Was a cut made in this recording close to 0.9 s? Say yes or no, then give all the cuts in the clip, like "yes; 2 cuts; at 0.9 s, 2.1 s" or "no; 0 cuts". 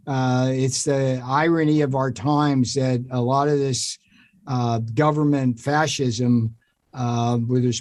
no; 0 cuts